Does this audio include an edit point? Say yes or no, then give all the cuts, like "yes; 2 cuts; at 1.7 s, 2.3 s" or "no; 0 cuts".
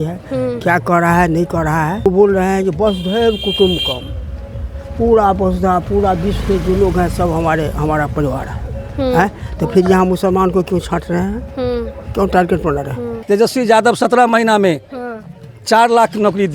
yes; 2 cuts; at 2.1 s, 13.2 s